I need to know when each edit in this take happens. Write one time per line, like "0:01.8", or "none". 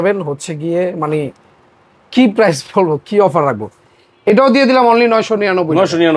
none